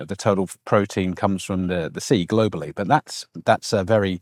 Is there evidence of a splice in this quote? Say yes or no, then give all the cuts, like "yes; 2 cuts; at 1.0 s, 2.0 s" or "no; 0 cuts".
no; 0 cuts